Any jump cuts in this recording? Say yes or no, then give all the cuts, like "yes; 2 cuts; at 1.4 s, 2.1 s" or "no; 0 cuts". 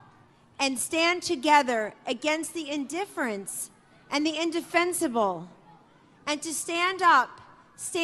yes; 1 cut; at 4.7 s